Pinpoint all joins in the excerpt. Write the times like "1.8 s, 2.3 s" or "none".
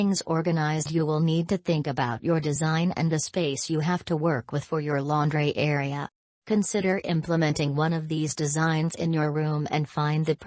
4.6 s